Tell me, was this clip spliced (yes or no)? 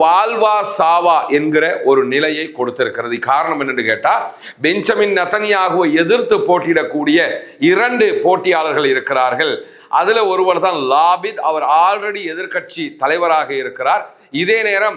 no